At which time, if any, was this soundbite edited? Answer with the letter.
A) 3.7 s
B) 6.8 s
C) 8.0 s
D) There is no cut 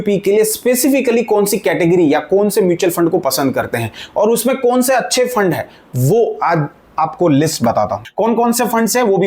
C